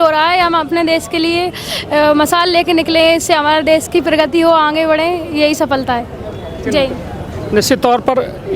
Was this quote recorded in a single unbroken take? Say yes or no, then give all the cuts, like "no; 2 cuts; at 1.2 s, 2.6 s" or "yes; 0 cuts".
yes; 0 cuts